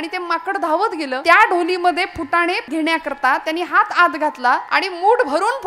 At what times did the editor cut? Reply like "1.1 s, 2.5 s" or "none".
1.2 s, 2.7 s, 4.7 s